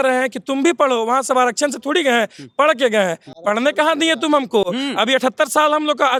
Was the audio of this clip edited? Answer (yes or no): no